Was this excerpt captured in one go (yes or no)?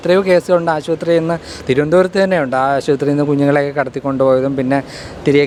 yes